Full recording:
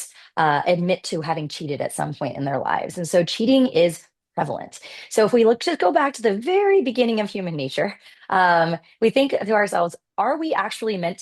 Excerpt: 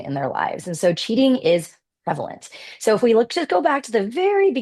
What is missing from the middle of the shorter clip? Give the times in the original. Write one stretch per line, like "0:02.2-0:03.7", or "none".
none